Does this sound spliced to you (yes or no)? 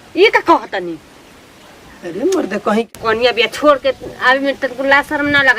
yes